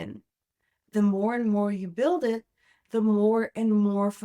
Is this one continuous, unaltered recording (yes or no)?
no